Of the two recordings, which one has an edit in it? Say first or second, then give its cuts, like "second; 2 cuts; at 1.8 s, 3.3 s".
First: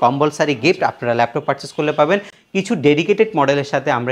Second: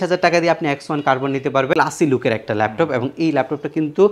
second; 1 cut; at 1.8 s